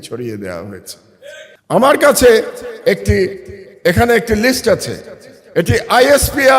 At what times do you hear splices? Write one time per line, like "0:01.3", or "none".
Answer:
0:01.5